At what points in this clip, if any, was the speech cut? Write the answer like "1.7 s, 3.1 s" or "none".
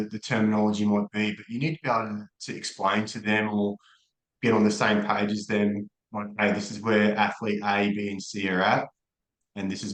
none